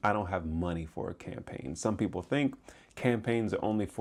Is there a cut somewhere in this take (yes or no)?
no